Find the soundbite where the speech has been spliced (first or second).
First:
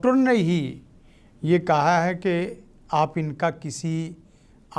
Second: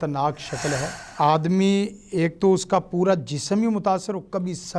second